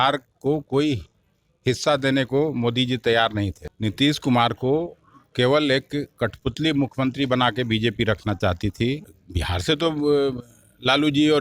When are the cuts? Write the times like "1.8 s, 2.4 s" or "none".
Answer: 3.6 s, 9.2 s